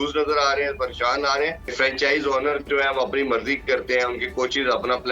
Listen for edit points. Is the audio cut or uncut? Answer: cut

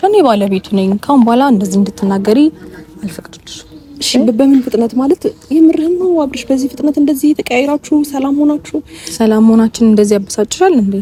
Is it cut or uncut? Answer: uncut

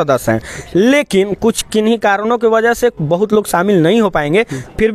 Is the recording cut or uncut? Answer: uncut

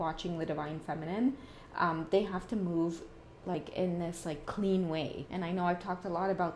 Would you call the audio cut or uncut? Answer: uncut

